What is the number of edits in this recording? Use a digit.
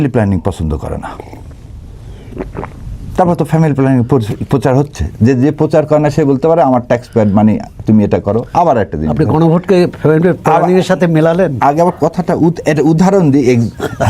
0